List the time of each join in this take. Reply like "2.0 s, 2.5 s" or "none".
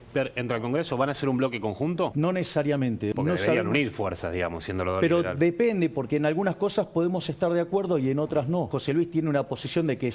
2.1 s, 3.1 s, 8.7 s